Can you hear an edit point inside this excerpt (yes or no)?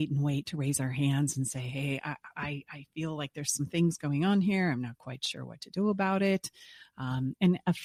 no